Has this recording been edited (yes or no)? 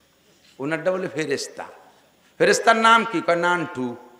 no